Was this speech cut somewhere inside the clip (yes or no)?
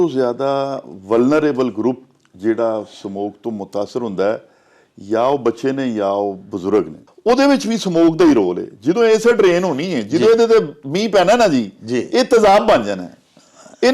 yes